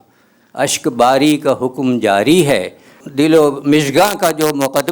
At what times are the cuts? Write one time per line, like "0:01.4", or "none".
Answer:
0:03.0